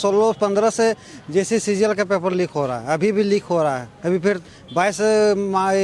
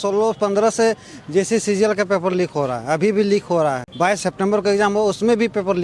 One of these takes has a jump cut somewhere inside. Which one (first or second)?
second